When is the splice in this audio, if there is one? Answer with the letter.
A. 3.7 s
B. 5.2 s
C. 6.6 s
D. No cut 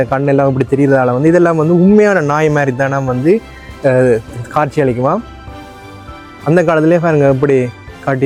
D